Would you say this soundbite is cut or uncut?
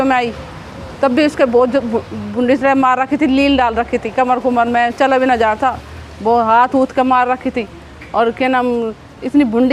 uncut